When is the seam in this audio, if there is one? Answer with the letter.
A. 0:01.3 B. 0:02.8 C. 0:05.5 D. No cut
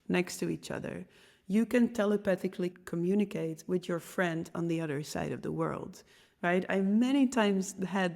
B